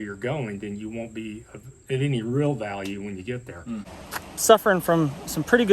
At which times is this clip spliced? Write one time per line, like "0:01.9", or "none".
0:03.9